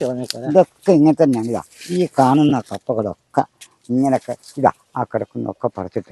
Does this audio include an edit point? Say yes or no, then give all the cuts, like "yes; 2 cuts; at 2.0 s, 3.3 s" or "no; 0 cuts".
no; 0 cuts